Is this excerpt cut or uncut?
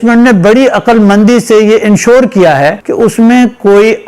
cut